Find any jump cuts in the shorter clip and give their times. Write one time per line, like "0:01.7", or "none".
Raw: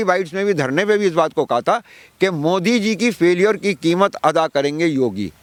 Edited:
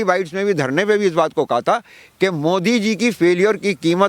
none